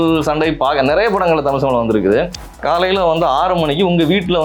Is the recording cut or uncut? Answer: cut